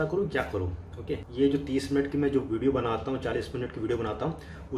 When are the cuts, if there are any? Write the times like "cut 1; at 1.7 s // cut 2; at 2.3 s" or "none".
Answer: cut 1; at 1.2 s